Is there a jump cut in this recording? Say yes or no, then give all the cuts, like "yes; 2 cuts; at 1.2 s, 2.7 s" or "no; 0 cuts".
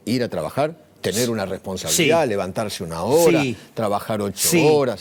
no; 0 cuts